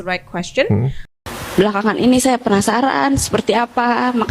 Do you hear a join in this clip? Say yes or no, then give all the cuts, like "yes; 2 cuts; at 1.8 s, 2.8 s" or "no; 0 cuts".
yes; 1 cut; at 1.0 s